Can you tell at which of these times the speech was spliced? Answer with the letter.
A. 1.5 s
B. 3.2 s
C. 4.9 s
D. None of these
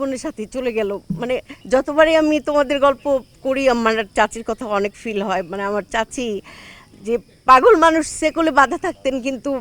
A